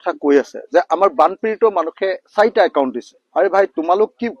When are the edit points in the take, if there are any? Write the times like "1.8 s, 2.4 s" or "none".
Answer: none